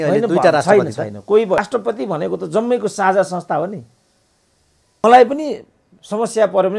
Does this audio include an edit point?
yes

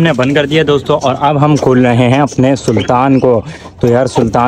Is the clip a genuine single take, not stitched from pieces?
yes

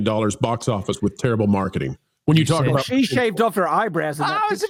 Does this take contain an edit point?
no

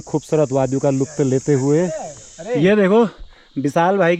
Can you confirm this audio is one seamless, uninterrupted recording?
no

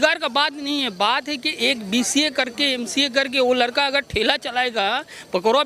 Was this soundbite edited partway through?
no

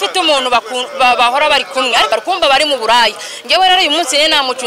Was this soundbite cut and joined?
yes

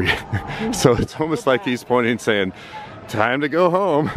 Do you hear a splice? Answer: no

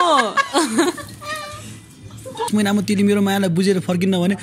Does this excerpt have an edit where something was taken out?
yes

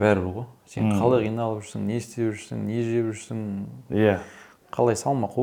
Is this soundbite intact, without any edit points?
yes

